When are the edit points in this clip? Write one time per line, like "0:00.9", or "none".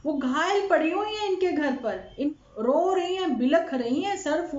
0:02.3